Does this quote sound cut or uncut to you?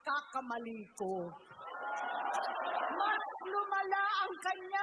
uncut